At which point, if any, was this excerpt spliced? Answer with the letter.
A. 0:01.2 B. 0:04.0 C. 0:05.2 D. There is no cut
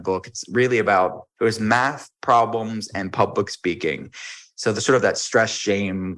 A